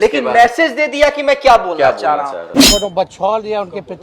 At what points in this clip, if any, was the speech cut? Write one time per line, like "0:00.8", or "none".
0:02.5